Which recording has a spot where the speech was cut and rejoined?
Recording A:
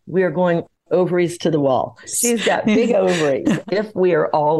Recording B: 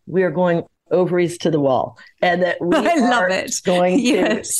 A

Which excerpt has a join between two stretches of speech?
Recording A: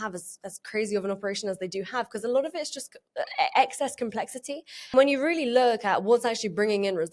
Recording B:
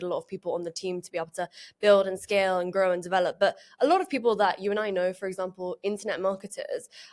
A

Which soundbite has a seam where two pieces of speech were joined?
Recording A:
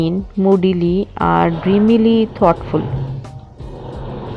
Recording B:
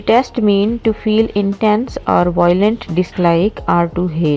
B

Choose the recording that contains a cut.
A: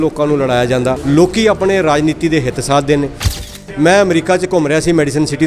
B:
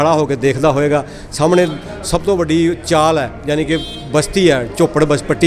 A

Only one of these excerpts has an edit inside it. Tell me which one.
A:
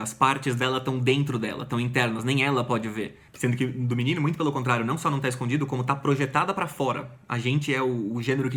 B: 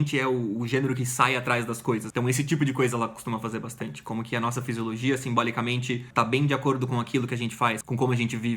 B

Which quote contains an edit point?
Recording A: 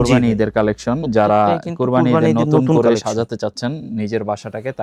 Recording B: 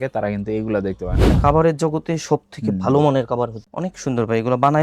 B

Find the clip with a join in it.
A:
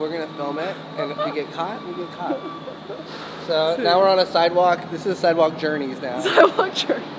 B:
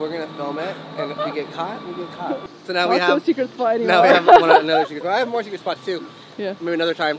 B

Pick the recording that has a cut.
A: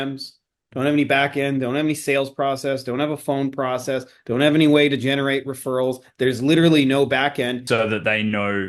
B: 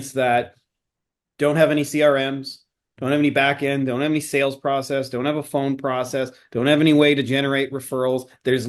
A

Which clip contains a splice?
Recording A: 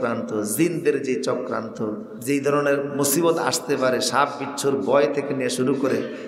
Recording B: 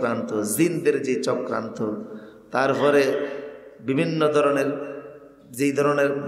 A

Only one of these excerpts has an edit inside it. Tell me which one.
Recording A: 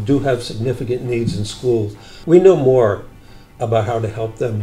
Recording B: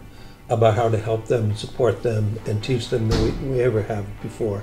A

